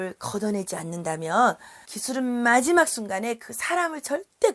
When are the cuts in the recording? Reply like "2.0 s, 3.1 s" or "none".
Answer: none